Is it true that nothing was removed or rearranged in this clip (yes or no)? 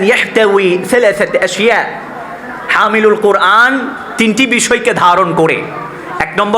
yes